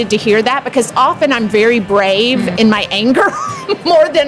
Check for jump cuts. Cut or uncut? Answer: cut